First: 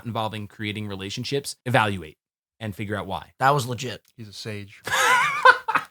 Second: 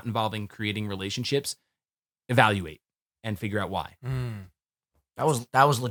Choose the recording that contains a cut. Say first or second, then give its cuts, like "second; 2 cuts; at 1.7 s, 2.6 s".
first; 2 cuts; at 1.5 s, 3.3 s